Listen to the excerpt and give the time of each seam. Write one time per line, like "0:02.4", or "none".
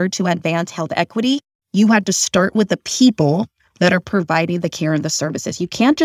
none